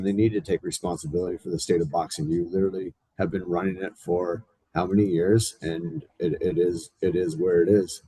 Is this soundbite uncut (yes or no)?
yes